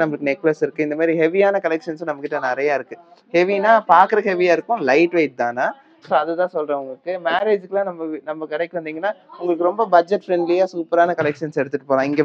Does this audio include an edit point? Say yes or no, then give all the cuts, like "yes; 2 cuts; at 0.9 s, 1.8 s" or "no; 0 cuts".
no; 0 cuts